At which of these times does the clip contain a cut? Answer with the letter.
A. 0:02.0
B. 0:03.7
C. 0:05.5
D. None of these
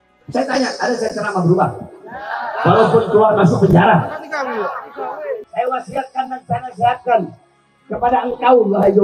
C